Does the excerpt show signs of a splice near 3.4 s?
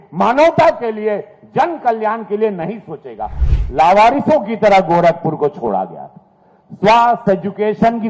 yes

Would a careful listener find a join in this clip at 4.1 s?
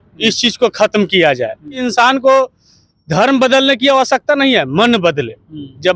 no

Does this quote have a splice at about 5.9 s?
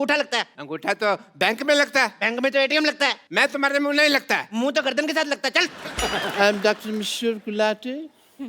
yes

